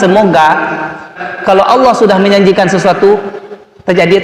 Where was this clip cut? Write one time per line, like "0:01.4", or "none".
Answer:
0:01.2

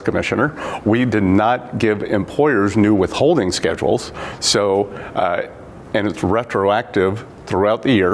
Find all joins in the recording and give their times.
0:01.3
0:02.3

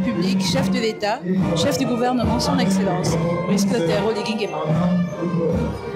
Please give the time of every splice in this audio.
none

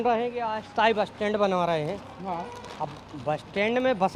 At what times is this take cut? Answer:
none

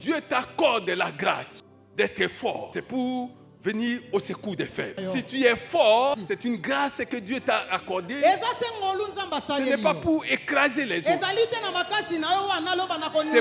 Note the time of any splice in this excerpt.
0:01.5
0:02.7
0:05.0
0:06.1

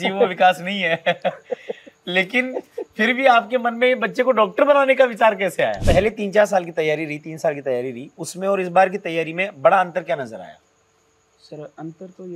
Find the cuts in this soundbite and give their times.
0:05.8

